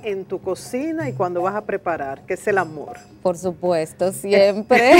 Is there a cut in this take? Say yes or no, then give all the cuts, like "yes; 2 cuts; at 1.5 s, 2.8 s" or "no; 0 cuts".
no; 0 cuts